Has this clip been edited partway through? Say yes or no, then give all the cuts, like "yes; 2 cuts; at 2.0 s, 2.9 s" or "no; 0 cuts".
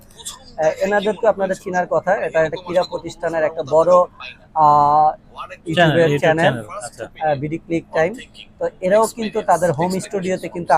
no; 0 cuts